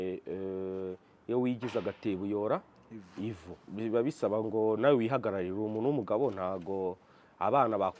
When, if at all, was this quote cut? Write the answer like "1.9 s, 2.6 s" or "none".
3.6 s